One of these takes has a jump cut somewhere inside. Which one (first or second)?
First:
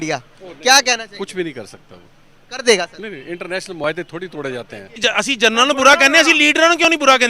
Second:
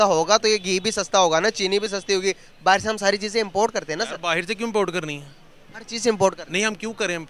first